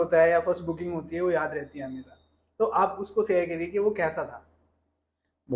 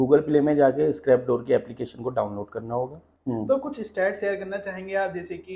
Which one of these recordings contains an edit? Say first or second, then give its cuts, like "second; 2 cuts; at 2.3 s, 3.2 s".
second; 1 cut; at 3.1 s